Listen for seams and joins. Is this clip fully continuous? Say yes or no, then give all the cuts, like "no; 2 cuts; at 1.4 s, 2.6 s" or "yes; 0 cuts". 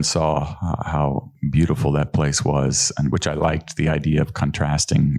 yes; 0 cuts